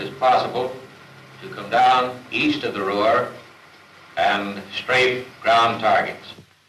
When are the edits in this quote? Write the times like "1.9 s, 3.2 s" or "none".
none